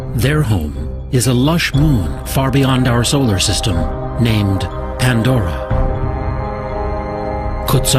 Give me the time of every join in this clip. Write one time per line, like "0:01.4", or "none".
0:04.0

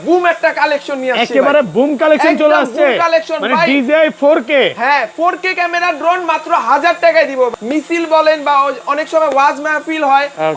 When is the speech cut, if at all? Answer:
0:07.5

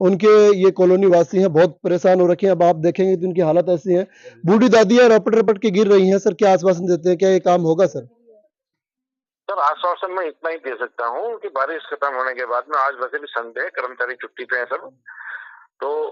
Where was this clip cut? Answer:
none

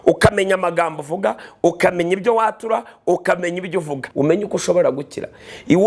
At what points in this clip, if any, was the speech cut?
0:04.0

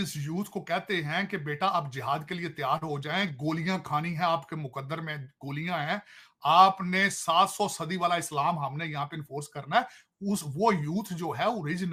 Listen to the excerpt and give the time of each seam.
none

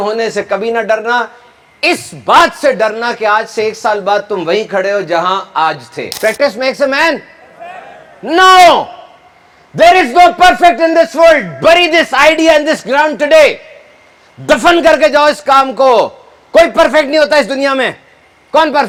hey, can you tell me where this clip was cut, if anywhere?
none

